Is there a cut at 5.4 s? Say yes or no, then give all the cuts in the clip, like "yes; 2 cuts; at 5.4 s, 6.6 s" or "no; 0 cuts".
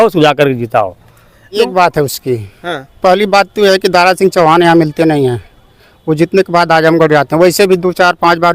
no; 1 cut; at 1.7 s